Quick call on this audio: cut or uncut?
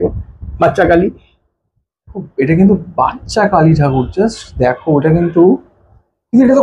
uncut